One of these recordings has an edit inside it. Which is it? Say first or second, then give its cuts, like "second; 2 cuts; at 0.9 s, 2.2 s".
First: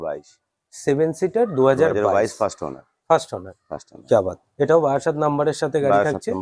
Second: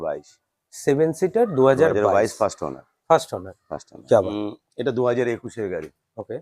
second; 1 cut; at 4.3 s